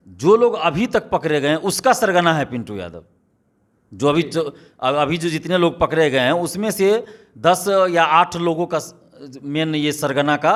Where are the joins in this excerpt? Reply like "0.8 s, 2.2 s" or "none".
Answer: none